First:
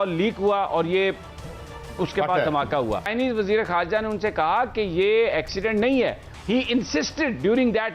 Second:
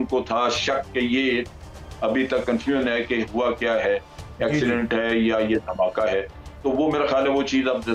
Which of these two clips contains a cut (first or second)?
first